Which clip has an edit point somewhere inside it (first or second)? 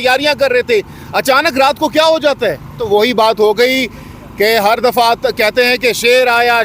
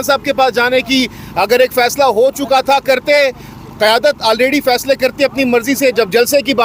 first